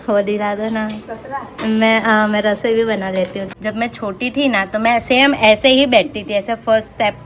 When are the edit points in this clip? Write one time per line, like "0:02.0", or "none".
0:03.5